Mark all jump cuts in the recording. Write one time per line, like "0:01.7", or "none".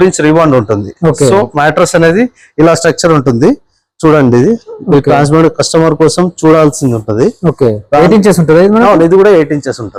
none

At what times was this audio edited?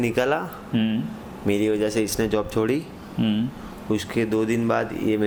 none

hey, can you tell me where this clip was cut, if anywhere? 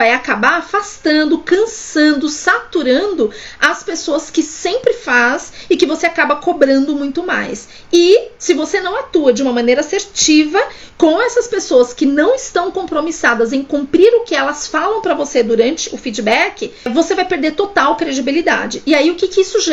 none

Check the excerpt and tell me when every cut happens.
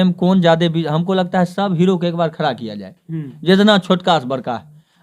none

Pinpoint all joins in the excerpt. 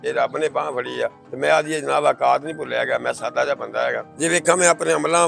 0:01.2
0:04.1

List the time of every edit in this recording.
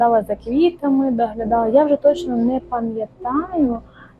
none

